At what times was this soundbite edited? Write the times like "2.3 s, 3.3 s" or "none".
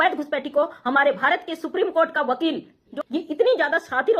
2.8 s